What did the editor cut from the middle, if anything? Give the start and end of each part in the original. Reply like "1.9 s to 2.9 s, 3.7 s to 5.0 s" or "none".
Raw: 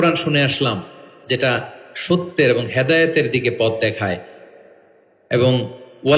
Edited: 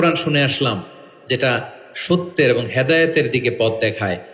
none